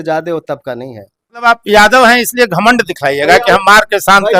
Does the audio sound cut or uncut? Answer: cut